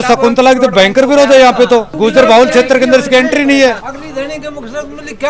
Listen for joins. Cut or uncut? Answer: uncut